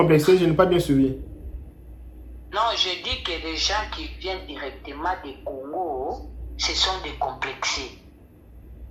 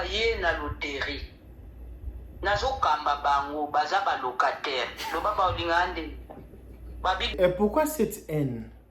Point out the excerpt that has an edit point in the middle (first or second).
second